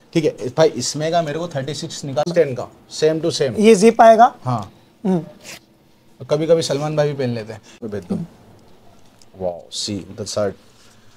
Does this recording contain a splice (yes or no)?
yes